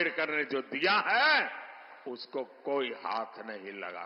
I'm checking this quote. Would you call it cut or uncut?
uncut